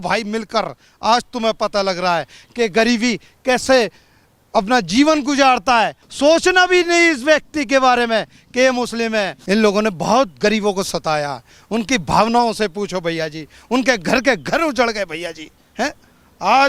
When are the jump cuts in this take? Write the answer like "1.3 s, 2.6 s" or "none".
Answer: 6.0 s, 9.4 s